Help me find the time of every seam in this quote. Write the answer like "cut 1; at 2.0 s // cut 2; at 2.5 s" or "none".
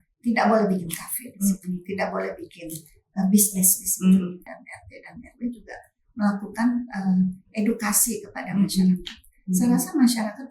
cut 1; at 4.5 s